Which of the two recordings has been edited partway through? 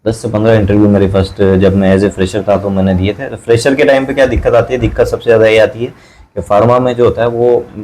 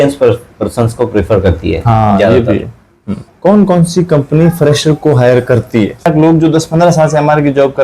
second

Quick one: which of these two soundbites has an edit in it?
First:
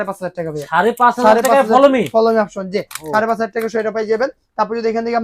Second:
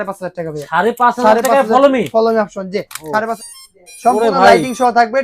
second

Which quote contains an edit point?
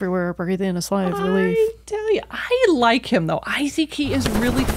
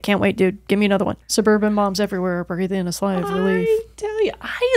second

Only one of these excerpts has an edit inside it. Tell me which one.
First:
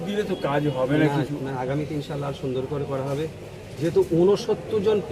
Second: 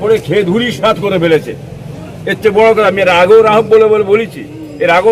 first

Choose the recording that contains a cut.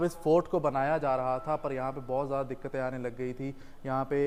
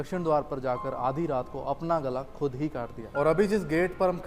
second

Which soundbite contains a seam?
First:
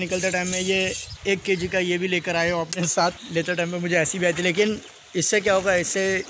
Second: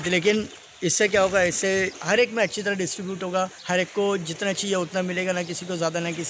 first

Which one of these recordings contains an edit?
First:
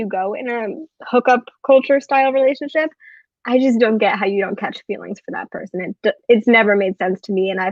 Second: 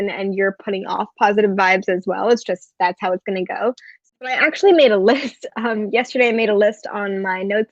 second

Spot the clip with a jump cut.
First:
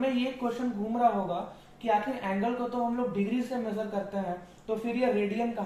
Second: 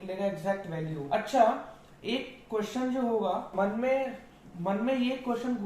second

